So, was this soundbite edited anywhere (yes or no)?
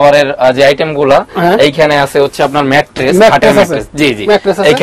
no